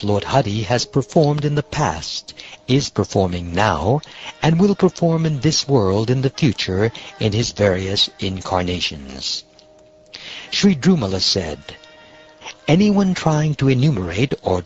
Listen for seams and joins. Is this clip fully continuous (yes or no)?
yes